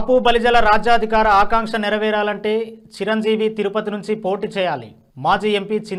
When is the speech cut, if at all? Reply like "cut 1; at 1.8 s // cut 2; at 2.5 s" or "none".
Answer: none